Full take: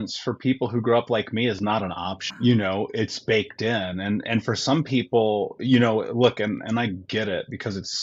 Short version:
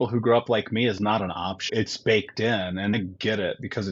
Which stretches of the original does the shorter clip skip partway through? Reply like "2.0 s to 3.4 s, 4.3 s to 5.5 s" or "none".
2.3 s to 2.9 s, 4.2 s to 6.8 s